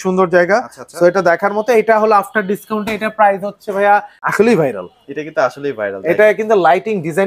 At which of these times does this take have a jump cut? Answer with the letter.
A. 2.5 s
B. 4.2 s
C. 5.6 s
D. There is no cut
B